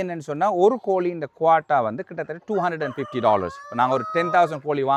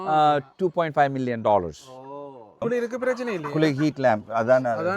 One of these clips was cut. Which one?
second; 1 cut; at 2.6 s

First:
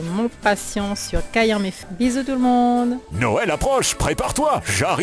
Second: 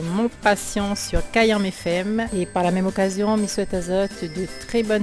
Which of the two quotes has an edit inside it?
first; 1 cut; at 1.8 s

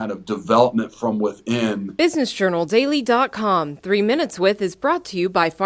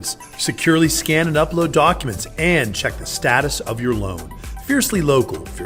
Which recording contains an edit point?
first; 1 cut; at 1.9 s

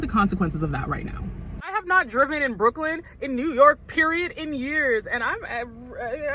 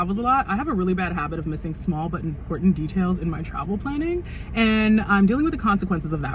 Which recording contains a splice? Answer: first; 1 cut; at 1.8 s

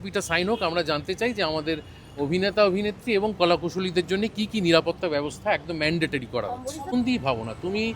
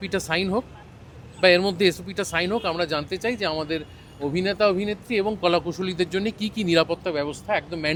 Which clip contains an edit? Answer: first; 1 cut; at 6.9 s

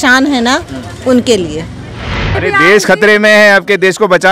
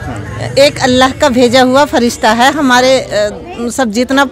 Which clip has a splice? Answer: first; 1 cut; at 2.4 s

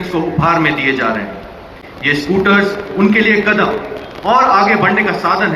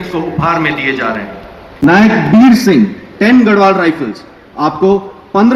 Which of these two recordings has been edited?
second; 1 cut; at 1.8 s

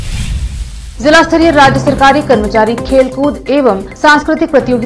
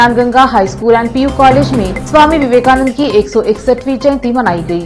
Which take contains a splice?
first; 1 cut; at 0.9 s

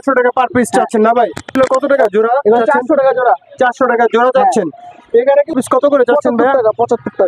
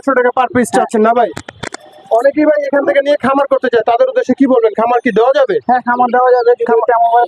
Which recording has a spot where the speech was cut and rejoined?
first; 3 cuts; at 1.5 s, 4.7 s, 5.5 s

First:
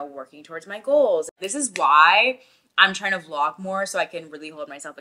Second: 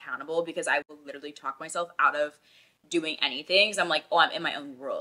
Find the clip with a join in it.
first; 1 cut; at 1.4 s

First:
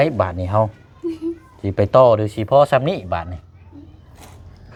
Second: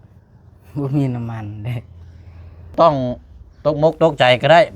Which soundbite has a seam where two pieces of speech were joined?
second; 1 cut; at 2.7 s

